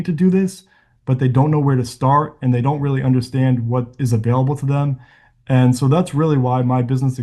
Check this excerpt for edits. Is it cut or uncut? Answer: uncut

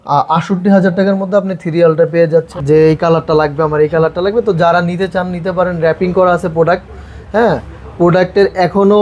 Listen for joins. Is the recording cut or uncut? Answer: cut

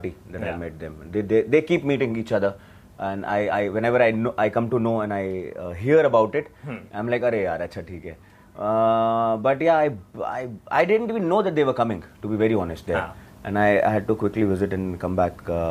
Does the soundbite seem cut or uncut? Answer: uncut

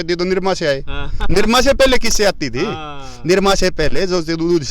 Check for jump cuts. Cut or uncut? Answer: uncut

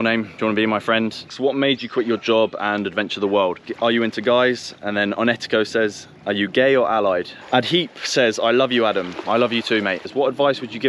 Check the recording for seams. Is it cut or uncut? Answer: cut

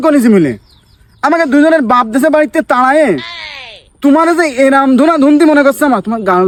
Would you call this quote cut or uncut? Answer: uncut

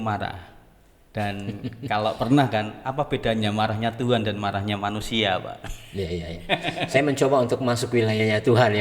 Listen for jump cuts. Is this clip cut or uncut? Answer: uncut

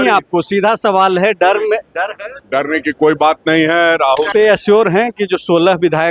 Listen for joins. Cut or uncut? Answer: cut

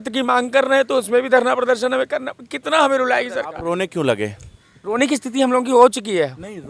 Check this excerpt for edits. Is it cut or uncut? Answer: cut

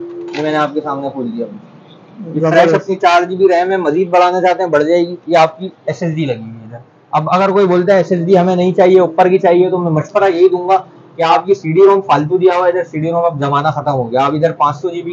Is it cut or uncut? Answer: uncut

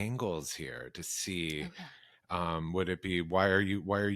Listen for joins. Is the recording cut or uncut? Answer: uncut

